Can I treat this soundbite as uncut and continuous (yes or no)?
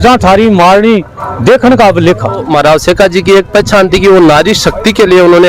no